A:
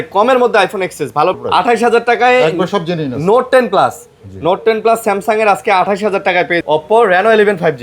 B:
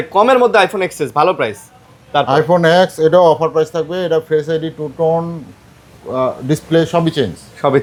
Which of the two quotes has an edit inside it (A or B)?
A